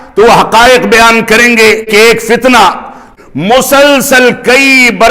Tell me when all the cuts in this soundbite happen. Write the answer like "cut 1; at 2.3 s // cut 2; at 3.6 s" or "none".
cut 1; at 1.9 s // cut 2; at 3.0 s